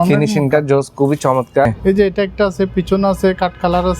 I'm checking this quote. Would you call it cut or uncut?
cut